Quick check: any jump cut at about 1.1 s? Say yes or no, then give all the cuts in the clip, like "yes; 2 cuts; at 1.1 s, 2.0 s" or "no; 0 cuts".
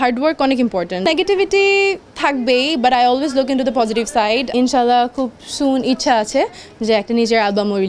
yes; 2 cuts; at 1.1 s, 4.5 s